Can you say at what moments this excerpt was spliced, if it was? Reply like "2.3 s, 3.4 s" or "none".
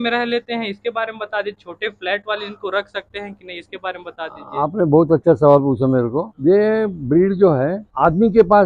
6.3 s